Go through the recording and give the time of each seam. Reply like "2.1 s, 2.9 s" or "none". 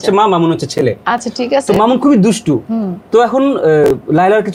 none